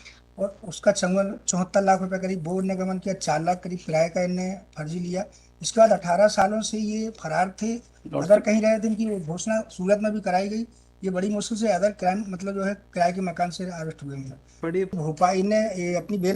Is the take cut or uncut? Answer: cut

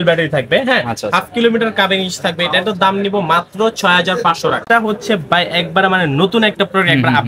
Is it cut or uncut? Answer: cut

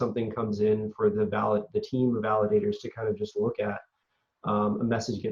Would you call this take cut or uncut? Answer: uncut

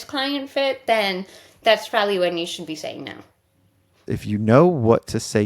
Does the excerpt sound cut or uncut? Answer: cut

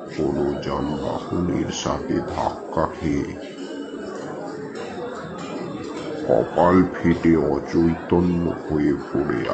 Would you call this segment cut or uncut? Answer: uncut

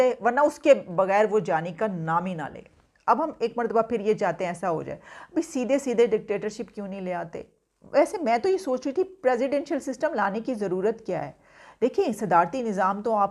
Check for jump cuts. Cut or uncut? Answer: uncut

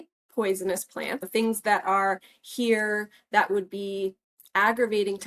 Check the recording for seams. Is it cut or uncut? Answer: cut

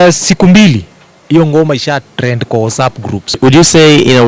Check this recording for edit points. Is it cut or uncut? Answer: cut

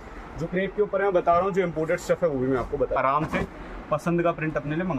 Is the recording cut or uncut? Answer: cut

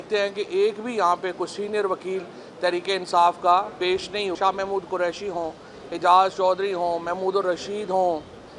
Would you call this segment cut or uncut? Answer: cut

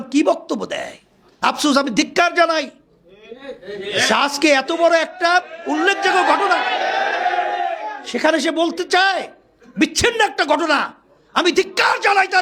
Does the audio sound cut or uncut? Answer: uncut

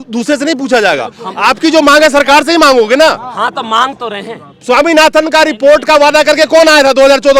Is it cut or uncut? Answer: uncut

